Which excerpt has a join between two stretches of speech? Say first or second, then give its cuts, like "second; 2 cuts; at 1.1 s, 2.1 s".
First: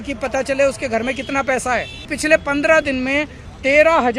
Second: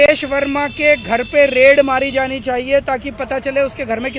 first; 1 cut; at 2.1 s